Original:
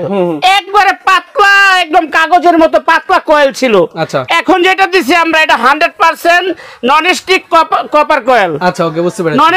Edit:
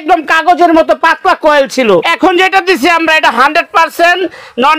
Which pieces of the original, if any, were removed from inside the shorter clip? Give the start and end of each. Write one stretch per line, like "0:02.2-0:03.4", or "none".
0:03.9-0:04.3